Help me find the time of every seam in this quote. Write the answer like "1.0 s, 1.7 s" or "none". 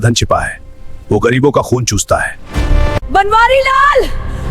3.0 s